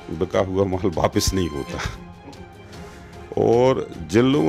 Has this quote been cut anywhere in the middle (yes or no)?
no